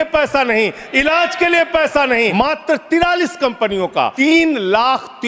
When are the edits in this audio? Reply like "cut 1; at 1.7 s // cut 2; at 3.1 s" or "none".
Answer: cut 1; at 2.3 s // cut 2; at 4.1 s